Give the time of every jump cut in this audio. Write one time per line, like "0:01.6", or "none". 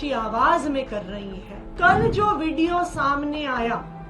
0:01.7